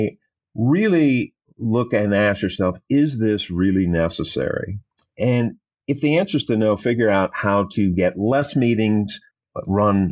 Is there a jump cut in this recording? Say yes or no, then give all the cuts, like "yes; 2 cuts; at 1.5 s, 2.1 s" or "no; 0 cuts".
no; 0 cuts